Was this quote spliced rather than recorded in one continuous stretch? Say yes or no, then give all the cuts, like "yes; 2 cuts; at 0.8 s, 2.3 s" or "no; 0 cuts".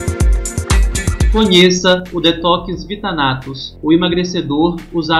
yes; 1 cut; at 1.3 s